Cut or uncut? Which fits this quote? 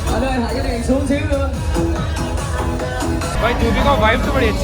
cut